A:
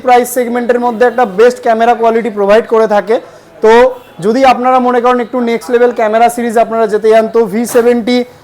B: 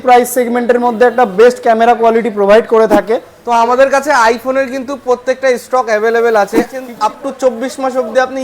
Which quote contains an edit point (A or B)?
B